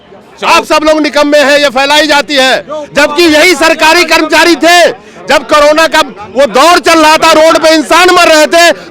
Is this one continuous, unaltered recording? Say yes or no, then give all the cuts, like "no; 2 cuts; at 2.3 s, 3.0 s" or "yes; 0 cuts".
yes; 0 cuts